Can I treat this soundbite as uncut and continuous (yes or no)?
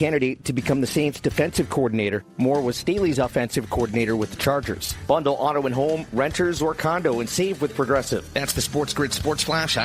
yes